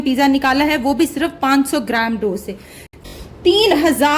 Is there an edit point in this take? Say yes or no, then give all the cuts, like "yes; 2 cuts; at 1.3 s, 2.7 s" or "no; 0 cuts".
yes; 1 cut; at 3.0 s